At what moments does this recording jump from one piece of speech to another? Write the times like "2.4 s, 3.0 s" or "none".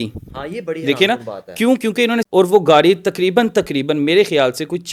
2.3 s